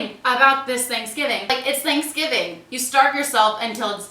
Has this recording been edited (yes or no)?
yes